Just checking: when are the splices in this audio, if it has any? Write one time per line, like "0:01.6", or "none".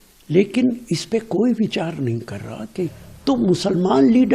0:03.0